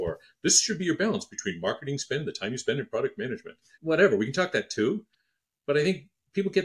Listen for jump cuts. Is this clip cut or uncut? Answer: uncut